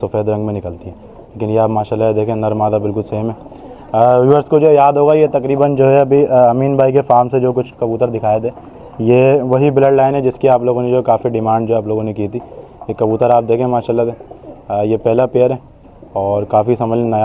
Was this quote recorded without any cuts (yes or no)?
yes